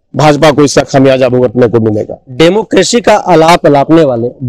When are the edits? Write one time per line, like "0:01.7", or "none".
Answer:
none